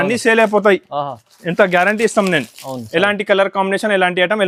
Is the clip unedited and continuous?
yes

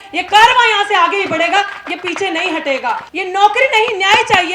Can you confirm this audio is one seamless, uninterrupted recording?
no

